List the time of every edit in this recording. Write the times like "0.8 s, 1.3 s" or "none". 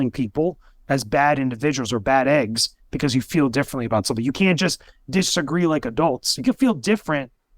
6.4 s